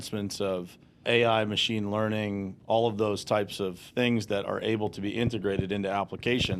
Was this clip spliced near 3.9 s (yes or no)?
no